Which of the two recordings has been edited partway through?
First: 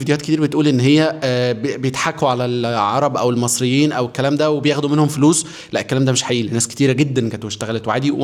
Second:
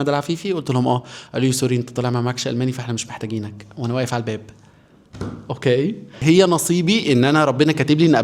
second; 1 cut; at 6.2 s

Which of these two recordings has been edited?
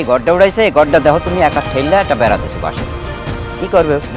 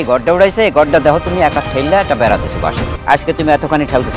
second; 1 cut; at 2.9 s

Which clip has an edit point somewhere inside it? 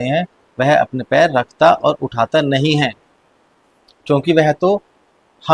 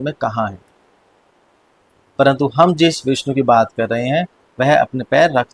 second; 1 cut; at 1.8 s

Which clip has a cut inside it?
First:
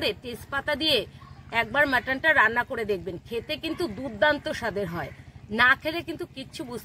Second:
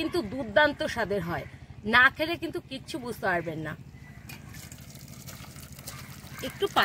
second; 1 cut; at 4.4 s

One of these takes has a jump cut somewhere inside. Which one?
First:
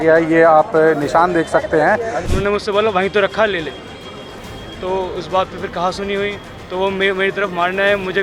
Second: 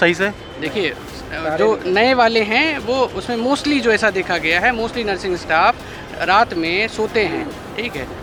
first; 1 cut; at 2.2 s

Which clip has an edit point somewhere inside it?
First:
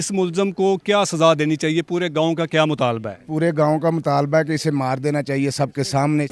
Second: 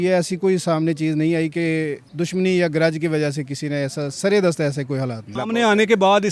second; 2 cuts; at 2.0 s, 5.4 s

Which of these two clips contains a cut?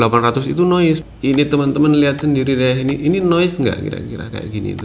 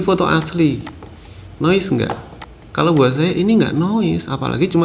first; 1 cut; at 1.0 s

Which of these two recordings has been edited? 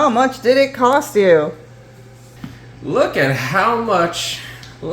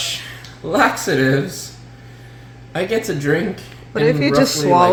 first; 1 cut; at 1.9 s

